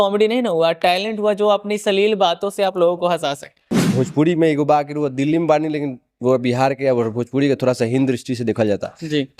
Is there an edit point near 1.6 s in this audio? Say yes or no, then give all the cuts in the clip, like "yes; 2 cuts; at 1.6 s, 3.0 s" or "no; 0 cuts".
no; 1 cut; at 3.8 s